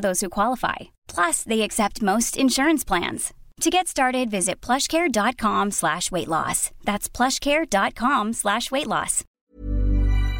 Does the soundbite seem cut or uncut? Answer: cut